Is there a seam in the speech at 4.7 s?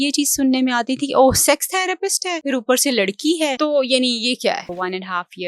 yes; 3 cuts; at 2.3 s, 3.5 s, 4.7 s

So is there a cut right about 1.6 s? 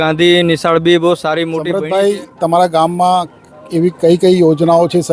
yes; 1 cut; at 1.6 s

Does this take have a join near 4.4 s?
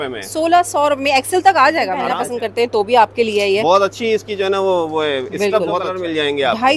no; 2 cuts; at 2.1 s, 5.8 s

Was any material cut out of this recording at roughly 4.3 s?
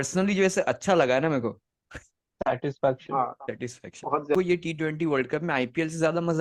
yes; 1 cut; at 4.3 s

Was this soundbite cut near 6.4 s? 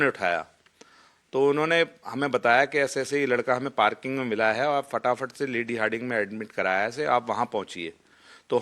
yes; 1 cut; at 6.4 s

